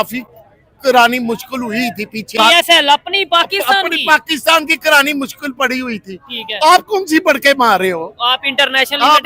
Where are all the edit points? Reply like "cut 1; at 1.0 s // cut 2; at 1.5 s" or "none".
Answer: cut 1; at 2.3 s